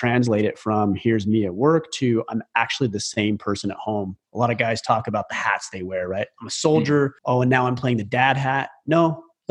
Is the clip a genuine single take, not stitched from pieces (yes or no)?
no